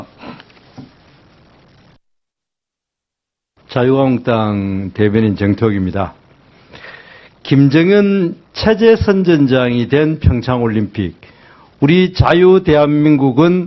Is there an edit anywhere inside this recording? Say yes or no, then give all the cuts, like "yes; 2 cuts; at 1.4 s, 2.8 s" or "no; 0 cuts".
no; 0 cuts